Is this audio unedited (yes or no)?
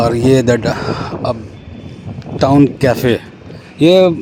yes